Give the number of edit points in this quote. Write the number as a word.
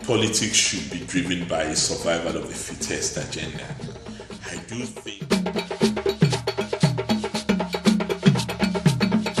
one